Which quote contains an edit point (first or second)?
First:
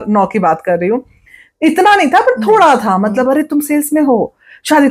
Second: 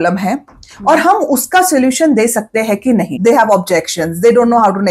second